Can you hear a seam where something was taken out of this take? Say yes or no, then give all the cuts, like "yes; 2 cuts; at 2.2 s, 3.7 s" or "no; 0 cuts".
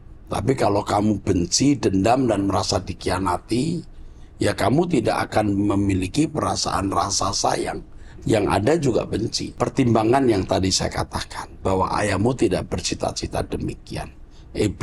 yes; 1 cut; at 9.4 s